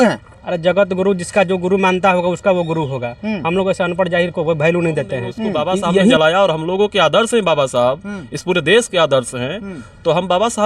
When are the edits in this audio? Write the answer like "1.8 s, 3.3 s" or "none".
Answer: 6.1 s